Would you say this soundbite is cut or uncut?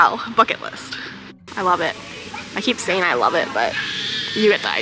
cut